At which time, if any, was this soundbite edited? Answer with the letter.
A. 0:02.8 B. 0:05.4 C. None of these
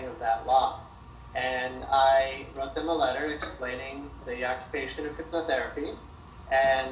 A